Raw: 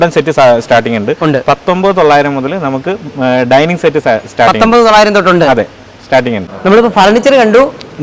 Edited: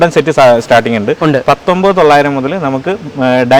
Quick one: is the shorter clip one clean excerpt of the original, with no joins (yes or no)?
yes